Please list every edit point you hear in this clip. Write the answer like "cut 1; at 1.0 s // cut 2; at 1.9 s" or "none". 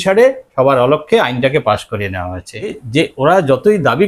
cut 1; at 2.7 s